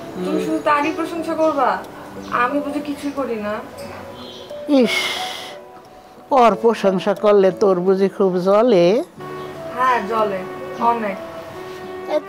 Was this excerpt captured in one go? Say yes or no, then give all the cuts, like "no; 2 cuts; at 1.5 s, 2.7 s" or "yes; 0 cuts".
no; 1 cut; at 4.2 s